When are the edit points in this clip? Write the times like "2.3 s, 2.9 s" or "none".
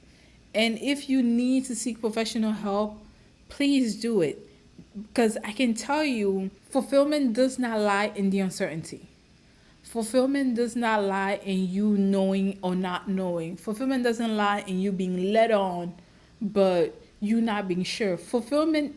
6.6 s